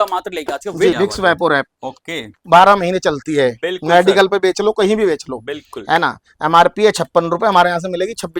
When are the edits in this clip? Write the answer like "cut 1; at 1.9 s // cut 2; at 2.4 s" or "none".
cut 1; at 0.9 s